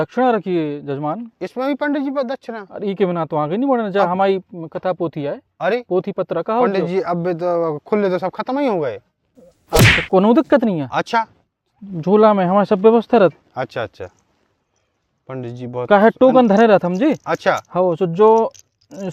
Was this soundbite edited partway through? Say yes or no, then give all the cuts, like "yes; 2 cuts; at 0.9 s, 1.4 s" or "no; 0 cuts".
no; 0 cuts